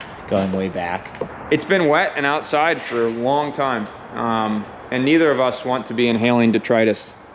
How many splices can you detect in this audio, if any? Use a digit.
1